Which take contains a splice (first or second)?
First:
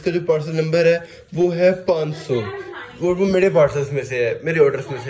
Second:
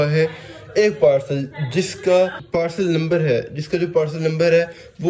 second